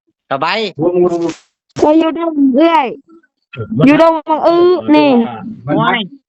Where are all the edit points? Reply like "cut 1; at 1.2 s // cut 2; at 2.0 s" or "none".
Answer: none